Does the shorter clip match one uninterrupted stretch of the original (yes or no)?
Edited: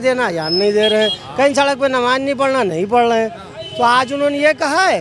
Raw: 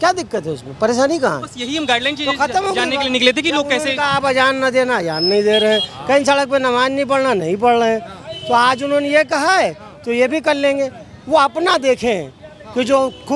yes